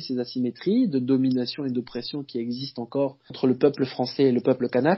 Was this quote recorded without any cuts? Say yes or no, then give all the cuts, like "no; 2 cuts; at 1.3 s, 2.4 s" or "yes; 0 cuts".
no; 1 cut; at 3.4 s